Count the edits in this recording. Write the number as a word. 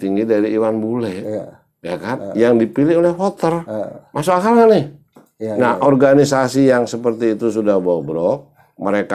zero